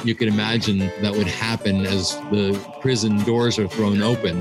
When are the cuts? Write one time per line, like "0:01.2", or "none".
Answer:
0:00.9